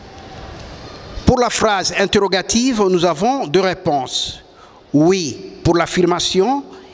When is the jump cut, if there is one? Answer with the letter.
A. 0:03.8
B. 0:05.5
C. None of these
C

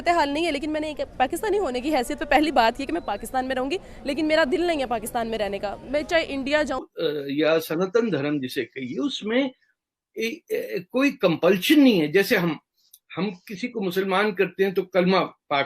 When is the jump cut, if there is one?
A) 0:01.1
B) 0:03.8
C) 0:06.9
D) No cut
C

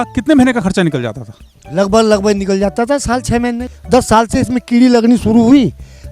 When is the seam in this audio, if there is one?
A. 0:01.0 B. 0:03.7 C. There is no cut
B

